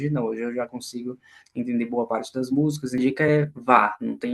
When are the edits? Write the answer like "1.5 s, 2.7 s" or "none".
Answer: 3.0 s